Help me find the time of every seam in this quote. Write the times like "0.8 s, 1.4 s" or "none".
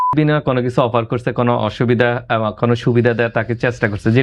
none